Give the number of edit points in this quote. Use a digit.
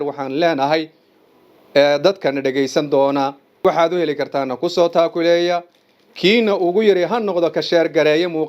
1